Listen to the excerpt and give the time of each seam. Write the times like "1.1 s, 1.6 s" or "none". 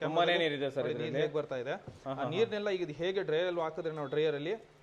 none